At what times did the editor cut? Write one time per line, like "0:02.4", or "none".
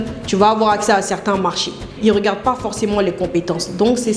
0:01.9